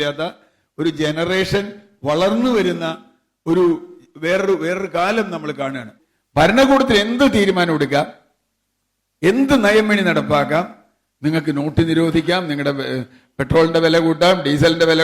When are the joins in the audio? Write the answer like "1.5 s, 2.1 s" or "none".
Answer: 5.9 s